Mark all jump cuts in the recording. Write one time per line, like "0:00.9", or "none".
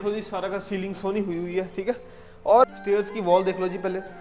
0:02.8